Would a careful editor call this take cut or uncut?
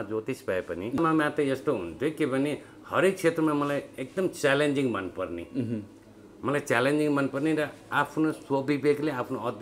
cut